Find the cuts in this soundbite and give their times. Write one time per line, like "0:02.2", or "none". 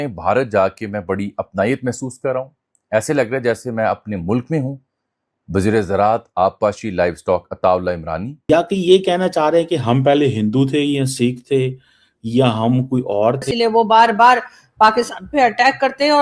0:08.3
0:13.5